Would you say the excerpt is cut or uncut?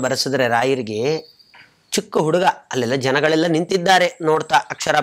uncut